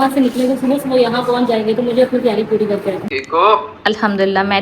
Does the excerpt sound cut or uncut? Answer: cut